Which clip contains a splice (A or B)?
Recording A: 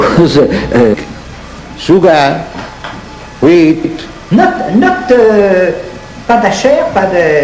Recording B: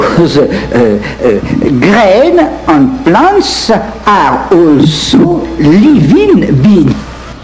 B